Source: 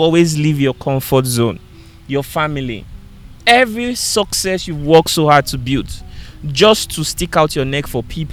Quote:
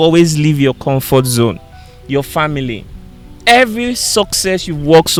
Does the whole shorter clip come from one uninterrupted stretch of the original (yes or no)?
yes